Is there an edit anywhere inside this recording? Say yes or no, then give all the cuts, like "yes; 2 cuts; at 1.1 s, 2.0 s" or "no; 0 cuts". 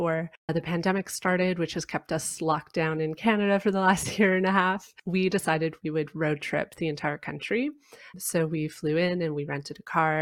no; 0 cuts